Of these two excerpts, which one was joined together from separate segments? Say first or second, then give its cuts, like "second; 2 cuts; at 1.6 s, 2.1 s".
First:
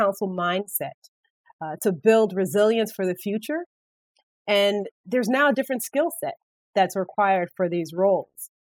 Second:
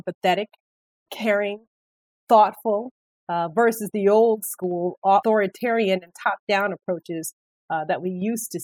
second; 1 cut; at 5.2 s